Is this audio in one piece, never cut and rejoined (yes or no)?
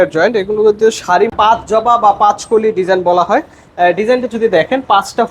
no